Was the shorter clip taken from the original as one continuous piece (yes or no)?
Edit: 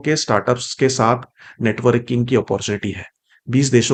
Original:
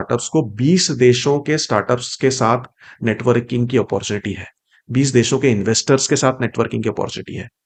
yes